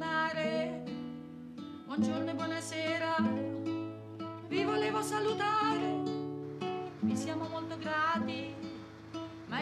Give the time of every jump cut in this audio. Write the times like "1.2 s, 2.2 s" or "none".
4.4 s